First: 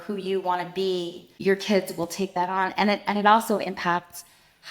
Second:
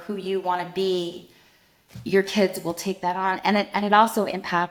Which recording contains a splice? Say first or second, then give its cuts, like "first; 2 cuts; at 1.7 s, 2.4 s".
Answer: first; 1 cut; at 1.2 s